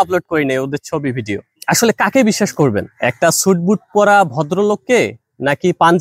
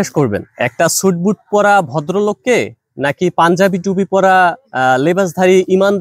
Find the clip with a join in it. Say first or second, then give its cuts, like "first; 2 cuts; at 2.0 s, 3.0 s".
first; 1 cut; at 1.5 s